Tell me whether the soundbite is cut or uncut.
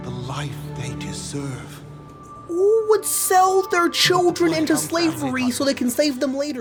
uncut